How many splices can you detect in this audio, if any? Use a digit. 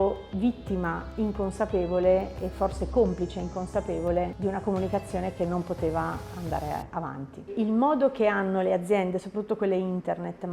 1